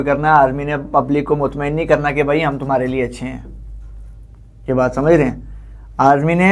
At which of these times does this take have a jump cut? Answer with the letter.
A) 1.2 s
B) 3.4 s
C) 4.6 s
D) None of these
D